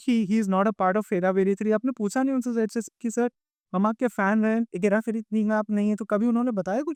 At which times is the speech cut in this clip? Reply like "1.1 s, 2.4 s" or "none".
none